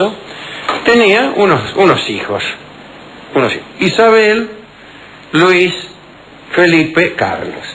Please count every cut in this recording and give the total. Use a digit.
1